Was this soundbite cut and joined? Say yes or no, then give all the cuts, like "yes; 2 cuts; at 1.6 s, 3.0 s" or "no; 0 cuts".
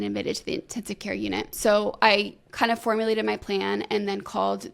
yes; 1 cut; at 1.5 s